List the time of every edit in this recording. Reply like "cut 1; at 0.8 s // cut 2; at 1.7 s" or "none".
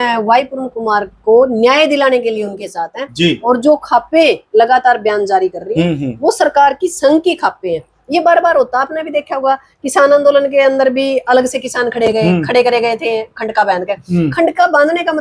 none